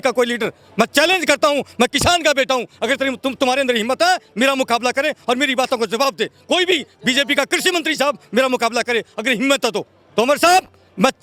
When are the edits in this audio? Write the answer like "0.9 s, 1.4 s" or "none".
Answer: none